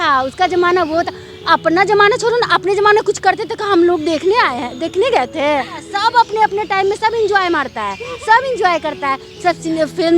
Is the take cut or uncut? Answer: cut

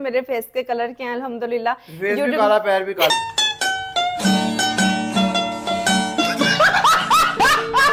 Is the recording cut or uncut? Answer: uncut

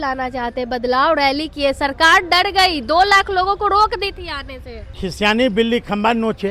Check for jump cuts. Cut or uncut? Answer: cut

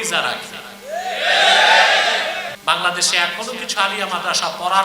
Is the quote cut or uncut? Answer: cut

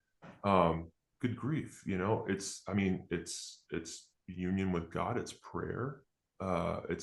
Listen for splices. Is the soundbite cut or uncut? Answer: uncut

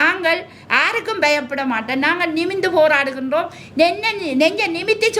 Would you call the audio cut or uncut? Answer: uncut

